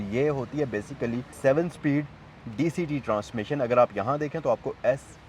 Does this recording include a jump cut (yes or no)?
no